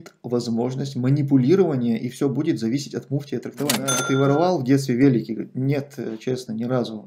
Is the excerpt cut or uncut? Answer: cut